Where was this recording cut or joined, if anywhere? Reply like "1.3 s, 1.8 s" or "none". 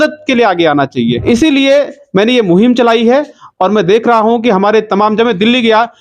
1.2 s

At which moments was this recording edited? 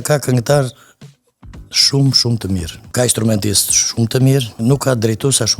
2.8 s, 4.5 s

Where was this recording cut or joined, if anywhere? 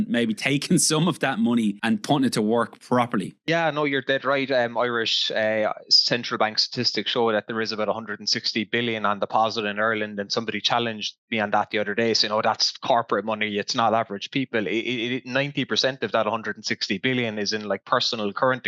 1.8 s, 3.4 s

